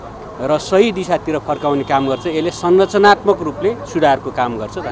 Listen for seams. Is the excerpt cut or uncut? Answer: uncut